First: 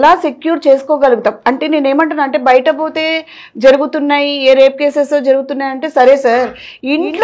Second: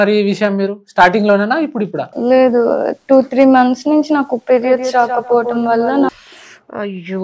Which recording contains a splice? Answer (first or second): second